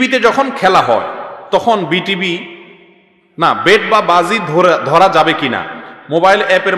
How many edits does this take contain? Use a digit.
0